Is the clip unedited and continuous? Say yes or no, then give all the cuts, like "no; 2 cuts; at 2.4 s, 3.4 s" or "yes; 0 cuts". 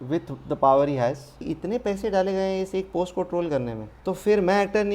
no; 2 cuts; at 1.4 s, 3.9 s